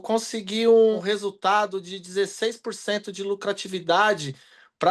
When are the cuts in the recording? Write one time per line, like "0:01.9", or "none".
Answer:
0:01.0